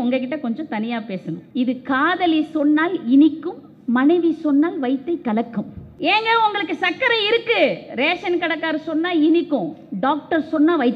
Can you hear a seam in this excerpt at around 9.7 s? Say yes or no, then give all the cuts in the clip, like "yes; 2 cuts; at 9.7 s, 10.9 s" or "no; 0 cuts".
no; 2 cuts; at 1.4 s, 5.8 s